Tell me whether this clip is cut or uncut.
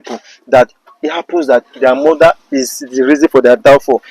uncut